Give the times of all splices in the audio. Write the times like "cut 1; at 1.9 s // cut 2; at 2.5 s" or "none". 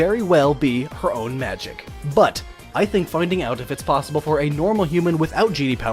cut 1; at 1.7 s